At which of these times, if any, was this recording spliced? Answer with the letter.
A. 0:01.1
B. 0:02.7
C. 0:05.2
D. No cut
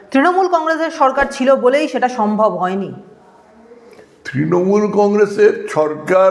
D